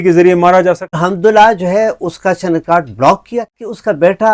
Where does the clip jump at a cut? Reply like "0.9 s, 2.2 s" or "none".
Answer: 1.0 s, 3.5 s